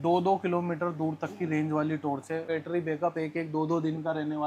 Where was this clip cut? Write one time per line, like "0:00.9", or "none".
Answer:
0:02.5

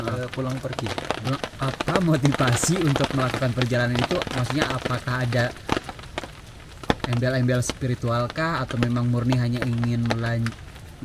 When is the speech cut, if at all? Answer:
0:01.5

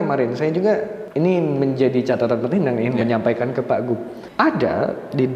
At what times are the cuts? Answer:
0:01.0
0:04.2

